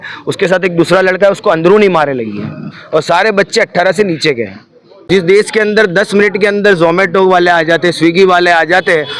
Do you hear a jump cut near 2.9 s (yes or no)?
no